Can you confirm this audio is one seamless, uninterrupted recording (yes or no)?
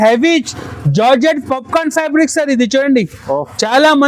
yes